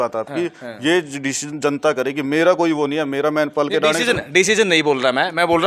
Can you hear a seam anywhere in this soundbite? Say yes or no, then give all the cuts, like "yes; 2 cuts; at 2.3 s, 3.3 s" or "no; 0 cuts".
no; 0 cuts